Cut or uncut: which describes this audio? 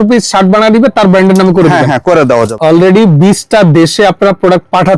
cut